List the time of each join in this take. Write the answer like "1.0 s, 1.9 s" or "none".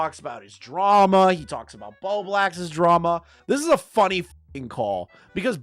3.3 s